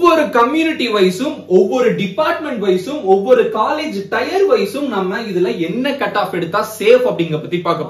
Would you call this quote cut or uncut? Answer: uncut